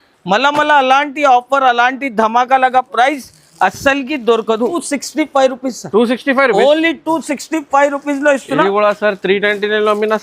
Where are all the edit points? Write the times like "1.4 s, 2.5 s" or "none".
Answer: 4.8 s